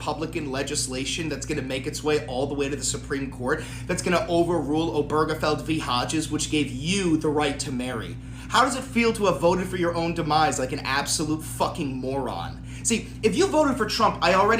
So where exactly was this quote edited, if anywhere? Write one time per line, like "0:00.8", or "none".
none